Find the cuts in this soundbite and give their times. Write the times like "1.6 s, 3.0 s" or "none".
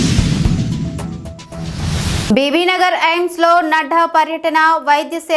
2.3 s